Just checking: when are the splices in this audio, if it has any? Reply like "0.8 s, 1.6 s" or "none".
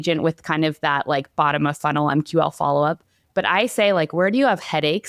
none